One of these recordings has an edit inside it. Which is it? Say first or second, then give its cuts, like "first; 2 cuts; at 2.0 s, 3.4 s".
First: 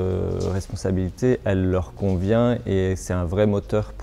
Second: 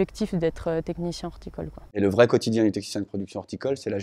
second; 1 cut; at 2.0 s